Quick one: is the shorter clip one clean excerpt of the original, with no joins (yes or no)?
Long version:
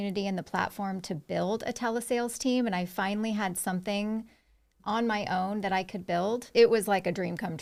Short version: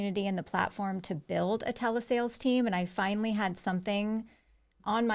yes